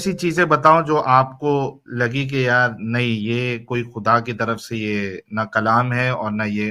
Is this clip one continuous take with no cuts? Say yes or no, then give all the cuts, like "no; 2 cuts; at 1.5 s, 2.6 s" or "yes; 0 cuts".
yes; 0 cuts